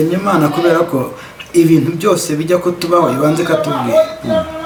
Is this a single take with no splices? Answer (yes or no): yes